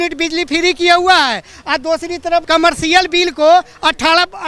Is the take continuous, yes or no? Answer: no